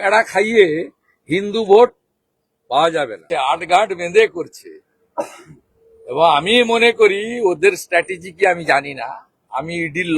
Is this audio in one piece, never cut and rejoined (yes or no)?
no